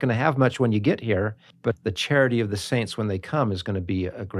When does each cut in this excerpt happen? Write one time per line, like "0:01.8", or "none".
0:01.7